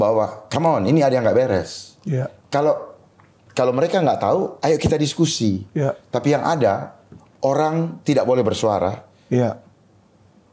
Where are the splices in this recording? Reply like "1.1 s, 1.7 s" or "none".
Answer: none